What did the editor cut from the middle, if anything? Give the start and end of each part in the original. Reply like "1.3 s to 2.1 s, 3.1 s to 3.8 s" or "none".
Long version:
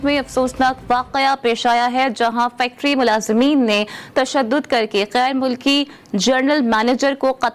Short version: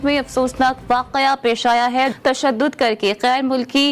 2.1 s to 4.0 s